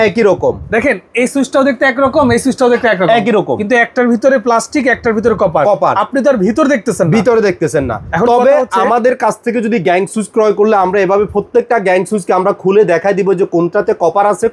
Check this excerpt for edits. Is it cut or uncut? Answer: uncut